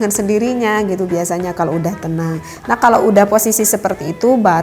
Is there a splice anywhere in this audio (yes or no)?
no